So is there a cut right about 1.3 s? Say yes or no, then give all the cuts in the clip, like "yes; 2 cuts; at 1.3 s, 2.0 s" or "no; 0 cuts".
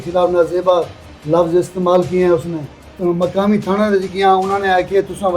no; 1 cut; at 2.9 s